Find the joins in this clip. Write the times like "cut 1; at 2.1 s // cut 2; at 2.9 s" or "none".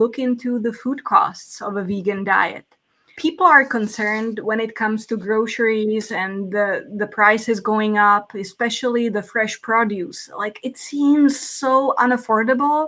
cut 1; at 3.1 s